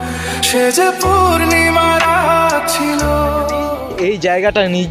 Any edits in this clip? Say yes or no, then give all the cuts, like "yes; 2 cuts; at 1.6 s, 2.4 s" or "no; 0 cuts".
yes; 1 cut; at 3.8 s